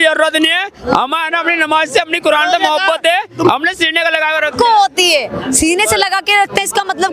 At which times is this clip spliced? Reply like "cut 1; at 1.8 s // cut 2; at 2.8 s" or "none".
none